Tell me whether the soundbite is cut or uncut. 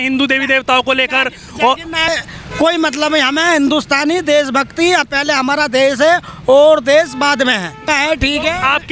cut